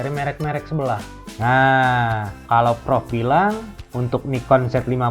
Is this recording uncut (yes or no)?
yes